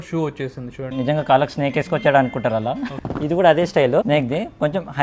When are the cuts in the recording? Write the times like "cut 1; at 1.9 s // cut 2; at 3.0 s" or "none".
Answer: cut 1; at 0.9 s // cut 2; at 2.9 s // cut 3; at 4.0 s

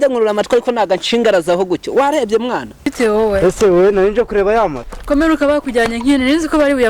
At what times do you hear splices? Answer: cut 1; at 2.9 s

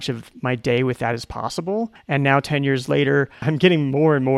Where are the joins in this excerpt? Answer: cut 1; at 2.0 s // cut 2; at 3.5 s

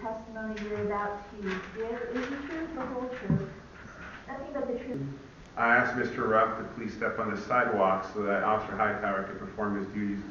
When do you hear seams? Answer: cut 1; at 4.9 s

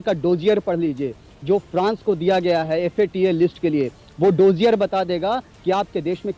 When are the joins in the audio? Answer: none

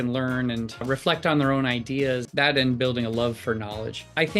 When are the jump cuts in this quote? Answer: cut 1; at 0.8 s // cut 2; at 2.3 s

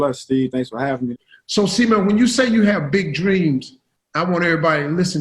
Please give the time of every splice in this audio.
cut 1; at 1.1 s

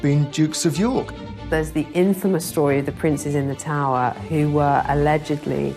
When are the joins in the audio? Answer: cut 1; at 1.1 s

